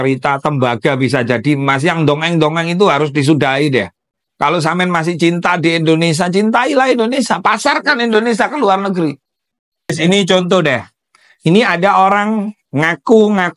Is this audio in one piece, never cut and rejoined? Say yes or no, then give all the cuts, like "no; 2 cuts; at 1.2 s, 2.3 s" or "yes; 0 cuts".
no; 1 cut; at 9.9 s